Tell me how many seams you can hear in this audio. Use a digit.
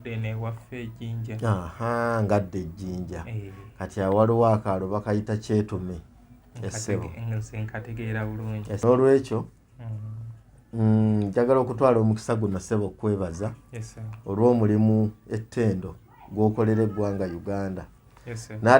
1